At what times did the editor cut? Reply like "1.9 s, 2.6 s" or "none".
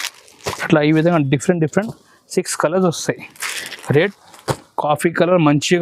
4.2 s